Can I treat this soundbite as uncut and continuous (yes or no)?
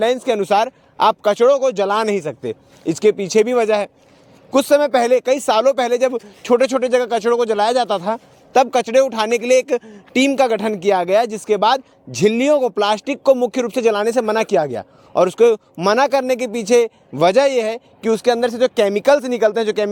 yes